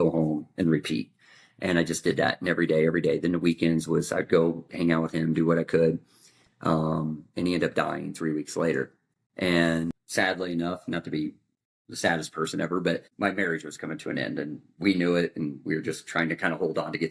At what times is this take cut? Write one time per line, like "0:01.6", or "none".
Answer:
0:10.0
0:13.1